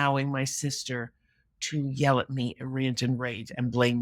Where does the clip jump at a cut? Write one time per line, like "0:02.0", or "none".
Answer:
none